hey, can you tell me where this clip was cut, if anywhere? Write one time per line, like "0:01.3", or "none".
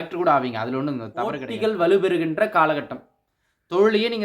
0:01.5